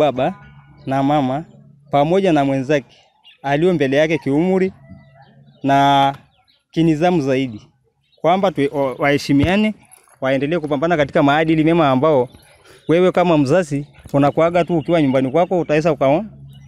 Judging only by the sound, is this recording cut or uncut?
uncut